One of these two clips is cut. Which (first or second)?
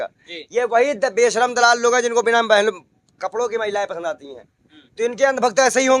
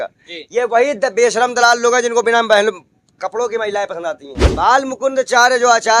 second